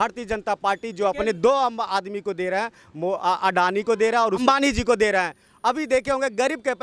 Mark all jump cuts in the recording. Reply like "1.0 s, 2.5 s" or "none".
4.4 s